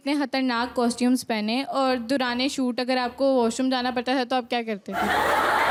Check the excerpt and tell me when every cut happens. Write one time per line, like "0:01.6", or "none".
none

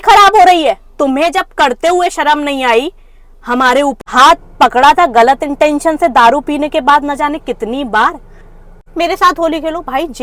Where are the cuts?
0:04.0
0:08.9

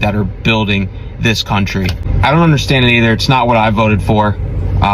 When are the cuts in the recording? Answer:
0:02.0

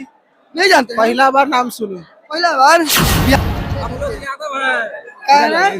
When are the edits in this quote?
0:03.3

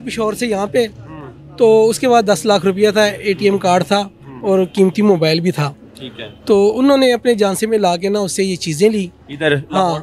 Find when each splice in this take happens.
none

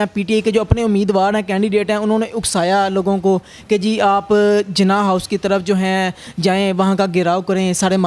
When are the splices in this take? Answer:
none

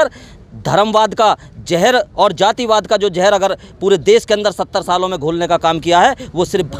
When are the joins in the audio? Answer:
none

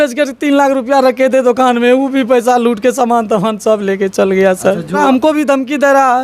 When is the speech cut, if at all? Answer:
0:05.0

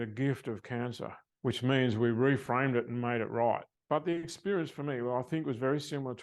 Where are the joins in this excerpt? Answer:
0:01.2
0:03.7

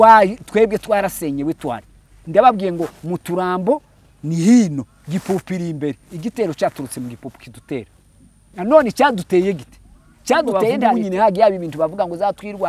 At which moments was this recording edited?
0:10.9

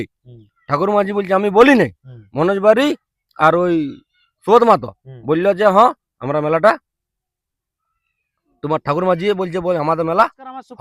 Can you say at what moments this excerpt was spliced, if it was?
none

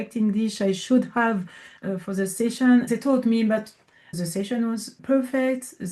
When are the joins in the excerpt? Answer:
0:02.9

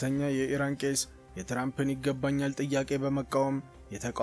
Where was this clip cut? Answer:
none

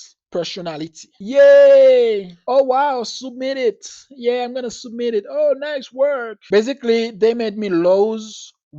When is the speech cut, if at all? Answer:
0:01.1

